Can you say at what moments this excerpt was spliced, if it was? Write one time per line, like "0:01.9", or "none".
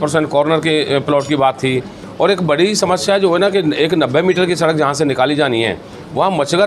0:02.0